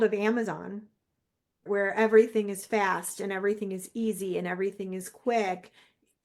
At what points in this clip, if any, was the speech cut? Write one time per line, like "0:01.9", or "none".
0:01.6